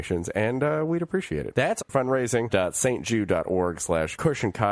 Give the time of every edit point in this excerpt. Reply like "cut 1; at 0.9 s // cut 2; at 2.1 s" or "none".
none

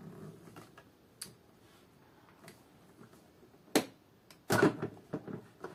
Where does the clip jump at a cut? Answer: none

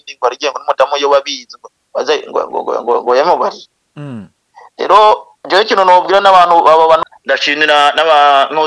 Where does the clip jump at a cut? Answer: cut 1; at 7.0 s

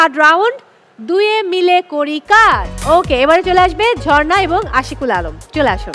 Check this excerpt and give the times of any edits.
cut 1; at 2.7 s

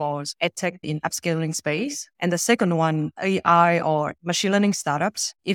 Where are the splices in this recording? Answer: cut 1; at 3.1 s

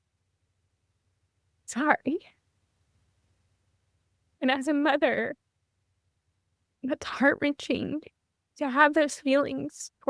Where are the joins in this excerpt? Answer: none

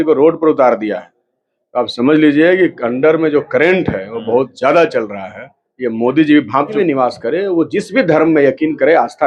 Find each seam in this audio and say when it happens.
cut 1; at 6.7 s

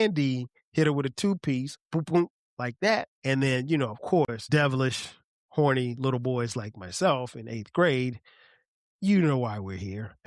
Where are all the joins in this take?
cut 1; at 3.1 s // cut 2; at 4.4 s

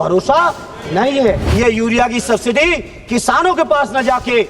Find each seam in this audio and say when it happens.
cut 1; at 1.4 s

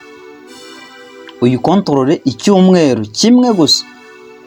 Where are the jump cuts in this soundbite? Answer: none

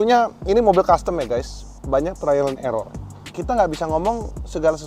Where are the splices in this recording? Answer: none

